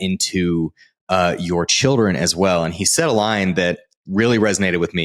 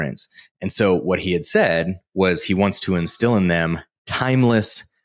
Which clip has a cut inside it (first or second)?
first